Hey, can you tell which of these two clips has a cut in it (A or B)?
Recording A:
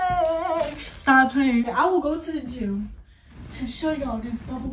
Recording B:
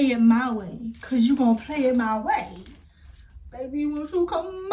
A